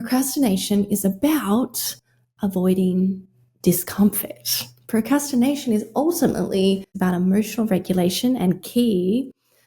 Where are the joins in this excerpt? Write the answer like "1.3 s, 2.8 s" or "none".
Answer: 6.9 s